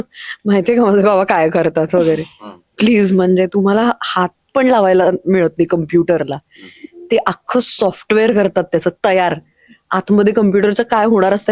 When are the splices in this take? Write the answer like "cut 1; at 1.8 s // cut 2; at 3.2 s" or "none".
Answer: none